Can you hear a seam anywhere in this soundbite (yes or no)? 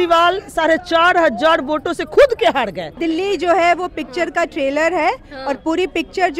yes